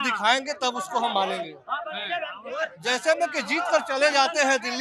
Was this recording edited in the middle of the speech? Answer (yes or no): no